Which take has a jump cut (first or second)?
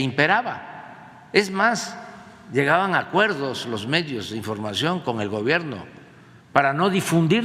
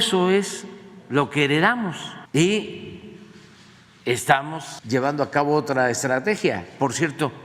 second